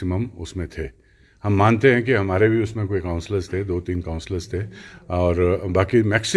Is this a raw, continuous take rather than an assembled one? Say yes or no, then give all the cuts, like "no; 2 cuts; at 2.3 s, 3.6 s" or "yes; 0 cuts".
yes; 0 cuts